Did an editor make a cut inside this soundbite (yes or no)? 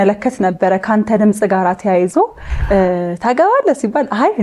yes